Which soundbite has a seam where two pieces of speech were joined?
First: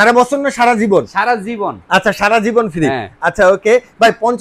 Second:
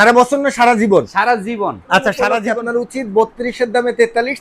second; 1 cut; at 2.4 s

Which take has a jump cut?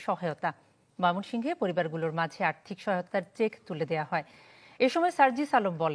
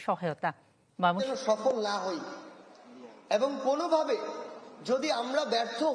second; 1 cut; at 1.2 s

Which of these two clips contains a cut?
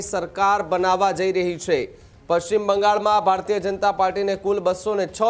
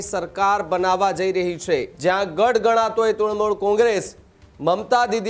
second; 1 cut; at 1.9 s

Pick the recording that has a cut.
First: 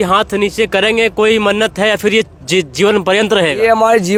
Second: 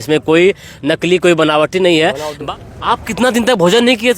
second; 1 cut; at 2.4 s

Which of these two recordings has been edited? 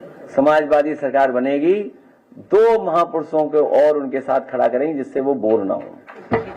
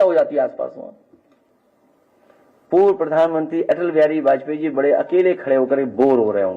second; 1 cut; at 1.5 s

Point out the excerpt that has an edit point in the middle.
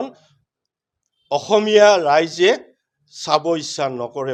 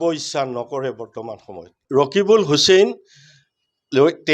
second; 1 cut; at 1.8 s

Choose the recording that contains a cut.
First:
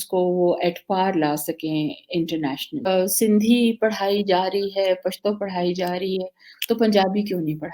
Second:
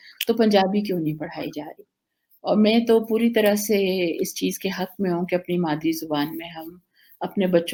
first; 1 cut; at 2.9 s

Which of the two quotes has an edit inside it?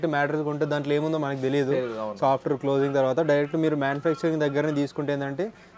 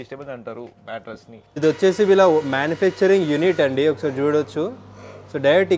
second; 1 cut; at 1.6 s

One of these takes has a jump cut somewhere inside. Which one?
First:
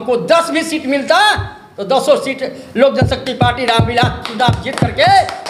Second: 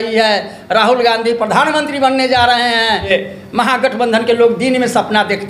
second; 1 cut; at 3.1 s

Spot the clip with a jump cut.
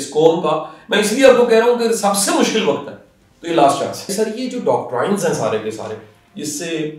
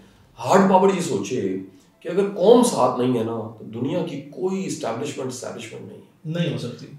first; 1 cut; at 4.1 s

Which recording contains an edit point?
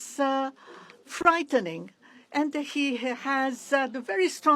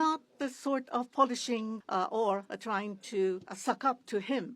second; 2 cuts; at 1.8 s, 3.5 s

